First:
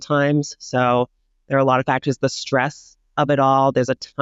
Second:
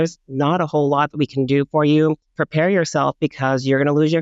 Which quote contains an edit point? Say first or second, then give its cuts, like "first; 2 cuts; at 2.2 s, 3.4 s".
second; 1 cut; at 2.3 s